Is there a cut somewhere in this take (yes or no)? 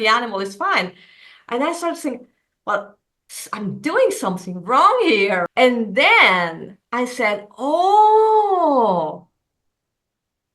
yes